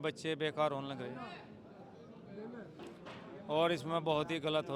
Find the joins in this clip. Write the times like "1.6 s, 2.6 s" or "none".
none